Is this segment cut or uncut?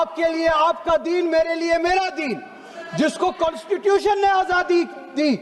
uncut